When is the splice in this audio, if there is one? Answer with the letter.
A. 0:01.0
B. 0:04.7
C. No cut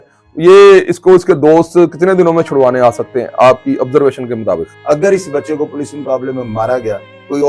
B